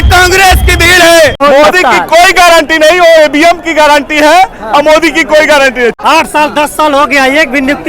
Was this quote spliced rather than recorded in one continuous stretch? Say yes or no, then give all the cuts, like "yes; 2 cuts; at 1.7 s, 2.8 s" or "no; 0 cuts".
yes; 2 cuts; at 1.4 s, 6.0 s